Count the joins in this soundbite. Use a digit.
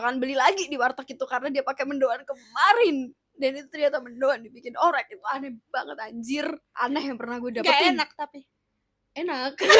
1